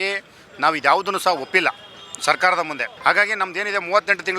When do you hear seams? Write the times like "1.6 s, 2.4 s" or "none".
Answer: 2.9 s